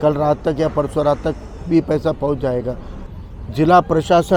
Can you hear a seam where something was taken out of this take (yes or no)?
yes